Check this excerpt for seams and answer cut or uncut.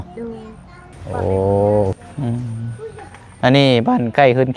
cut